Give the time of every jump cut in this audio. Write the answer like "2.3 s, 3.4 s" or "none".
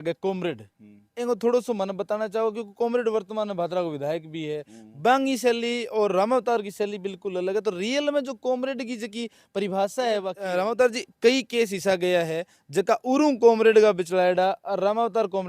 10.4 s